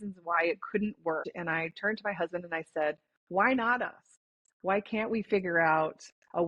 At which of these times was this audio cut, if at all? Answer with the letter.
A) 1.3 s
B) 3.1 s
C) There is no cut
A